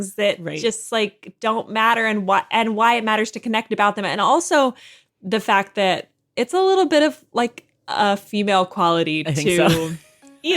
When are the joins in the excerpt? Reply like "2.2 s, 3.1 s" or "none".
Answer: 6.3 s